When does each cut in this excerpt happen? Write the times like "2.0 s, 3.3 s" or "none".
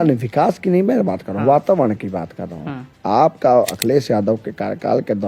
none